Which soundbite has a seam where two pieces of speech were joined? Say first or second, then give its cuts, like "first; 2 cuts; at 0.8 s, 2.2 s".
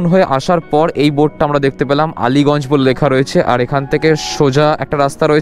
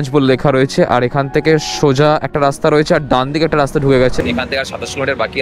second; 1 cut; at 4.2 s